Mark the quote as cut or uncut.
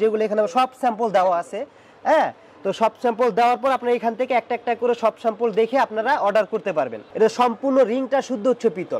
cut